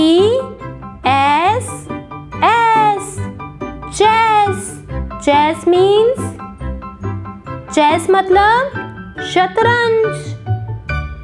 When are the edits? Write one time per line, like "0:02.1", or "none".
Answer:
0:10.1